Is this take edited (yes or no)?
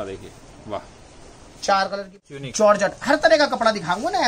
yes